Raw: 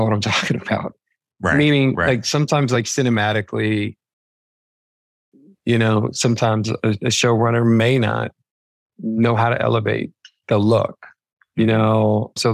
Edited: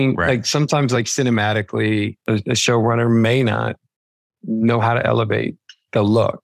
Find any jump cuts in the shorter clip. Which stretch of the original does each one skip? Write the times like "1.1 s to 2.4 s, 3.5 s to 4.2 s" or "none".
4.0 s to 6.7 s